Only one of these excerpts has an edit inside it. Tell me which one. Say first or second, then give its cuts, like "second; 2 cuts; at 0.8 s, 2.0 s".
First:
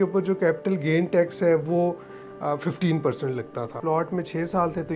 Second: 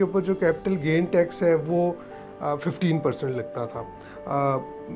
first; 1 cut; at 3.8 s